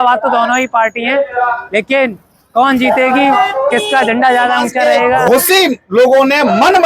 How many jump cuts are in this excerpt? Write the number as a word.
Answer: one